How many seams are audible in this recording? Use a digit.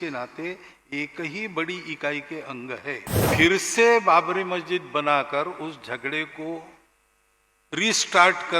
1